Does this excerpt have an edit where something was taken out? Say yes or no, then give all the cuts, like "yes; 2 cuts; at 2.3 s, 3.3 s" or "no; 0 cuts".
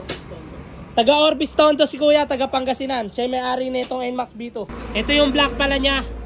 yes; 1 cut; at 4.7 s